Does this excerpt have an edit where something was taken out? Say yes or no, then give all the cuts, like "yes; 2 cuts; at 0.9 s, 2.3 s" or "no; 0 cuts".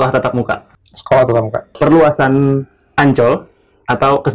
yes; 1 cut; at 1.8 s